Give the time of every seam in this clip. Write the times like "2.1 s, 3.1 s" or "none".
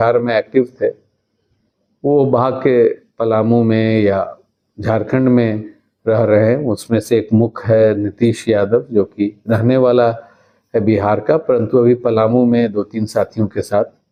none